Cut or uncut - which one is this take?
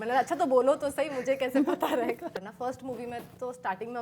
cut